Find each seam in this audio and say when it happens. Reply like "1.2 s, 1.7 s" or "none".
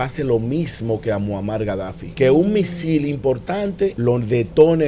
2.0 s, 4.0 s